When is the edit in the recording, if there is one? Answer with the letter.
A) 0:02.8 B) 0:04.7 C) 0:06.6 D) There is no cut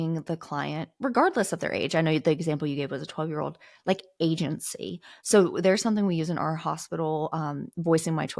D